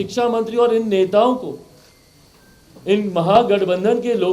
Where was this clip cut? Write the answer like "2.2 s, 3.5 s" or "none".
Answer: none